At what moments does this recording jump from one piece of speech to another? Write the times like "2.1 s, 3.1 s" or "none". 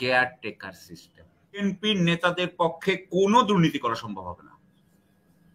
1.6 s